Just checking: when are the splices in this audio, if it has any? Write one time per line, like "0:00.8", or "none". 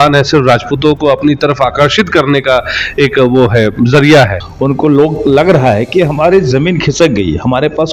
0:04.5